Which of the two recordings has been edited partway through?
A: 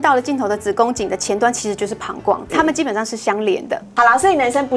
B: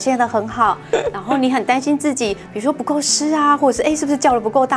A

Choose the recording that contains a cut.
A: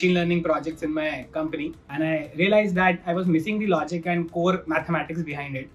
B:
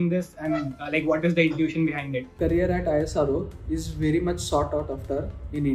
B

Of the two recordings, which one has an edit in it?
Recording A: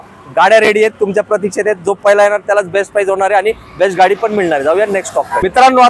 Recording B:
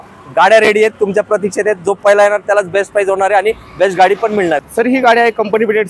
B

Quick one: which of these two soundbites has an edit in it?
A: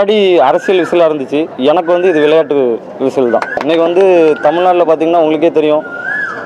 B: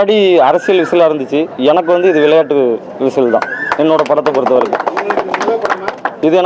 A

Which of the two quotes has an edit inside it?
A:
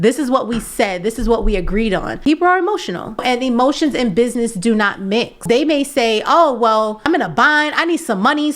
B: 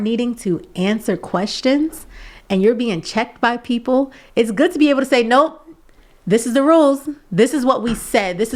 A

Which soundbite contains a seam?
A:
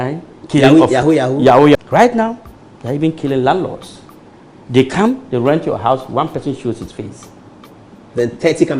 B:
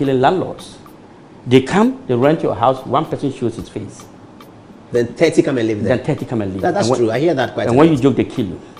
A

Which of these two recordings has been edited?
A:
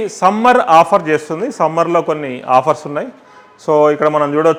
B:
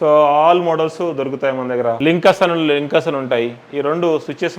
B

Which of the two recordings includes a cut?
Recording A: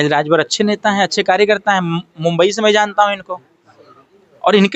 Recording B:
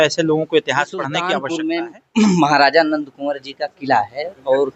B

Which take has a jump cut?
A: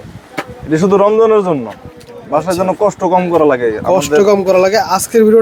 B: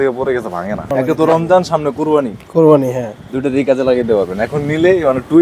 B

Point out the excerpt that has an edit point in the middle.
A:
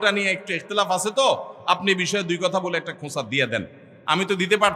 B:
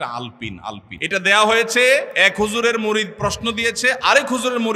B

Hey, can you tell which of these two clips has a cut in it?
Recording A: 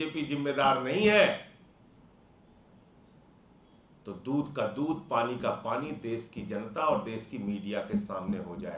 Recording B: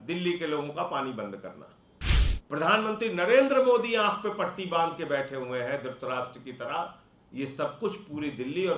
B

